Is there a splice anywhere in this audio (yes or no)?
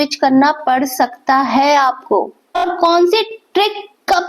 yes